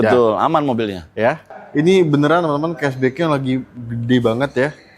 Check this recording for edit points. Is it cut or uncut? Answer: cut